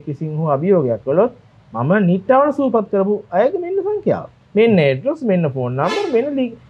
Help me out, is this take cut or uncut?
uncut